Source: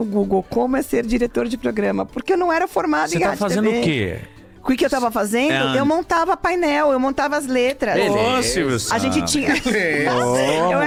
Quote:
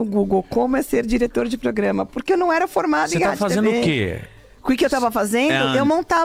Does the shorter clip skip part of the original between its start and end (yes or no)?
no